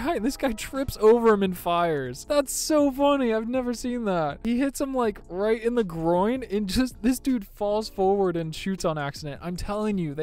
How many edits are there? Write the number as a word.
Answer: zero